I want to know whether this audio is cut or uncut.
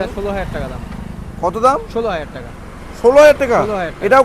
uncut